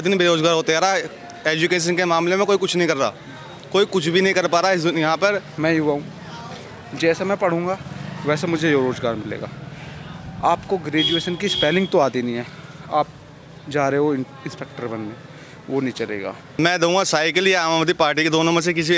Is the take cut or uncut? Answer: cut